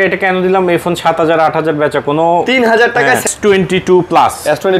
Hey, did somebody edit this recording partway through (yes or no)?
yes